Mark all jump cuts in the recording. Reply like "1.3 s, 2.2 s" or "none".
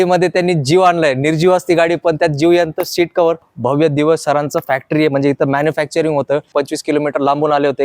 3.5 s, 6.5 s